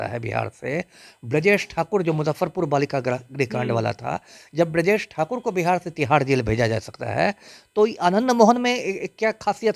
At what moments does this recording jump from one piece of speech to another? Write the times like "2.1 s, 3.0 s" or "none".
none